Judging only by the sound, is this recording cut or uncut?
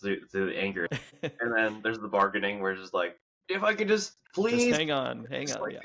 cut